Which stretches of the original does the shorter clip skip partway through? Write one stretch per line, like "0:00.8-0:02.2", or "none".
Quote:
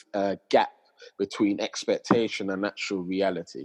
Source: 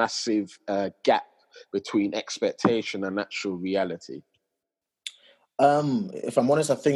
none